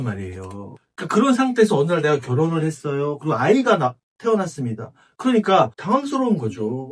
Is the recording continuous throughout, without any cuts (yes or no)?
yes